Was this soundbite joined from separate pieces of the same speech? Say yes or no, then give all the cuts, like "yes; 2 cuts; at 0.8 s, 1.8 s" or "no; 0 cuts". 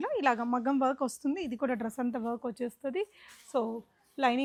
no; 0 cuts